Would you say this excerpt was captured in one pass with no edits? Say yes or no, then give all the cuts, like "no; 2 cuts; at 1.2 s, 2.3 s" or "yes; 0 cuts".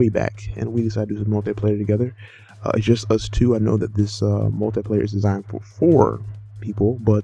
no; 1 cut; at 2.1 s